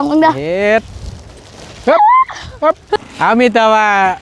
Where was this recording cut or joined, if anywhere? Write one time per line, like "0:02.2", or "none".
0:02.8

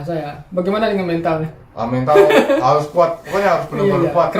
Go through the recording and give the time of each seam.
none

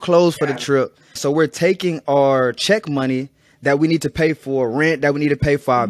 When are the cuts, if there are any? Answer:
0:01.2

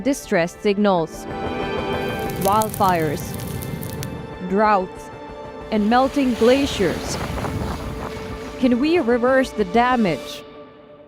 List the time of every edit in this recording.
none

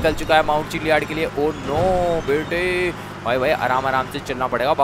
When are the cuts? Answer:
none

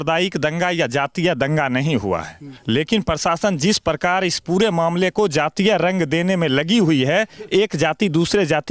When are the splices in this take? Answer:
none

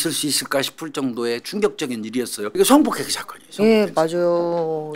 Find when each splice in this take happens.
0:02.5

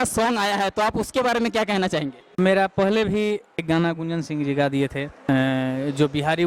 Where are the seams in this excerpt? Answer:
0:02.4
0:03.6
0:05.3

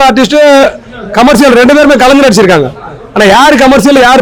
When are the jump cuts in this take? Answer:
none

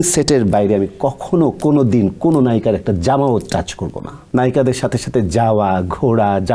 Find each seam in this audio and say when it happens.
0:04.1

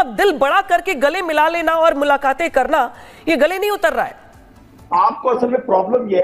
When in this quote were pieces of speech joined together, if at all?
0:04.7

